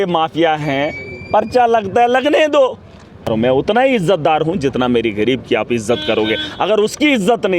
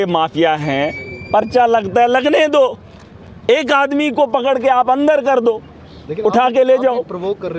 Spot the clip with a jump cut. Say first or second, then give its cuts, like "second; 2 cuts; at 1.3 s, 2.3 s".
first; 1 cut; at 3.3 s